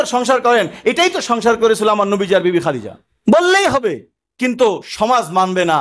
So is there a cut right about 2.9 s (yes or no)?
yes